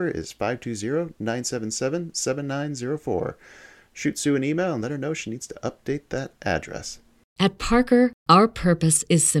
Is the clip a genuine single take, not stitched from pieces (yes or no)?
no